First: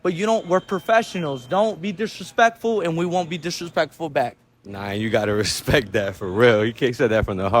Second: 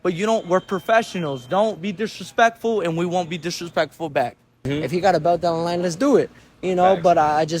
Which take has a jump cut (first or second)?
second